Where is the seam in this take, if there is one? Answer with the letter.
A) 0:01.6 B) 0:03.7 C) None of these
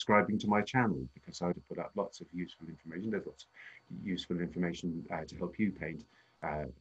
A